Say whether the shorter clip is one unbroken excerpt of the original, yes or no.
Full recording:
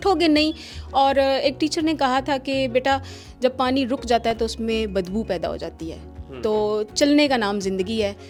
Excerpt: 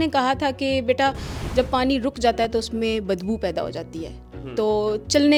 yes